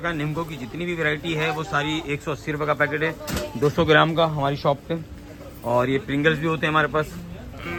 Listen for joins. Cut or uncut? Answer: uncut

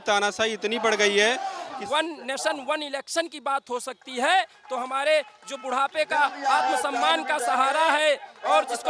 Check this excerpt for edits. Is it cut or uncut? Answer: cut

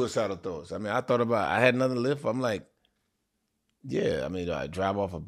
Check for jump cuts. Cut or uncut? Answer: uncut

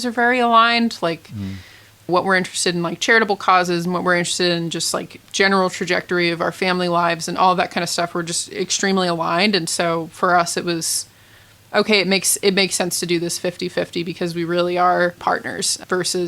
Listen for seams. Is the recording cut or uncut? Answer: cut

